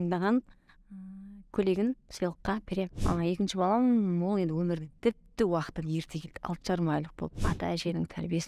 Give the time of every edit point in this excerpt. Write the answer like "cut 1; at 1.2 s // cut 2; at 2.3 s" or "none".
cut 1; at 3.0 s // cut 2; at 7.5 s